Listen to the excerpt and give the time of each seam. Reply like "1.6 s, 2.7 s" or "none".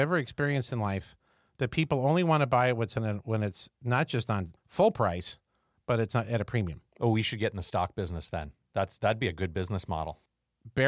4.6 s

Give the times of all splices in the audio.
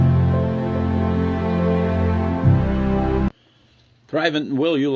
3.3 s

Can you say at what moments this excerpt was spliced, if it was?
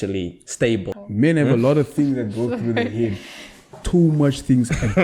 1.0 s

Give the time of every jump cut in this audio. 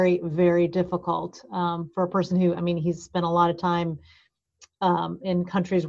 none

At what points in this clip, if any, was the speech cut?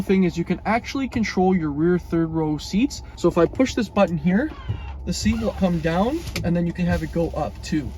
3.1 s, 5.6 s, 6.7 s

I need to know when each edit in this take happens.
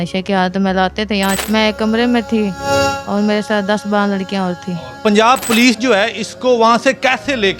1.4 s, 4.9 s

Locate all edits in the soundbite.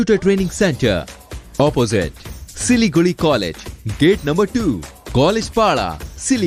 none

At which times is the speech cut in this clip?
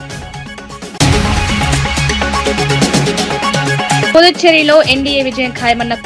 none

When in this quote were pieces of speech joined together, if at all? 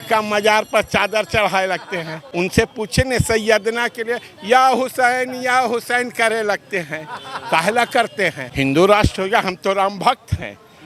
2.2 s, 8.4 s

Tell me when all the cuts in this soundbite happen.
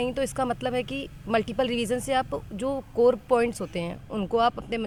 none

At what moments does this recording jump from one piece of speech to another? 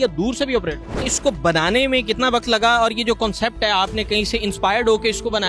1.1 s

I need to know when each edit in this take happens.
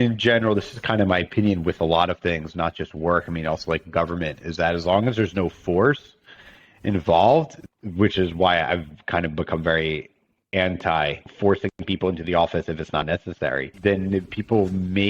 7.6 s, 11.3 s, 13.7 s

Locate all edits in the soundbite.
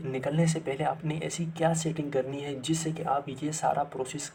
none

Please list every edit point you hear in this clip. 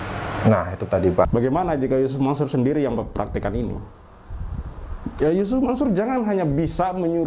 1.3 s

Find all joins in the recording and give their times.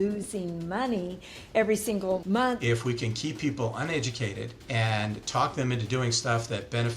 2.4 s, 4.5 s

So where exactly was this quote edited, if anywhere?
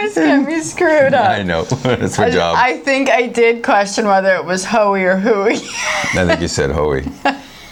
none

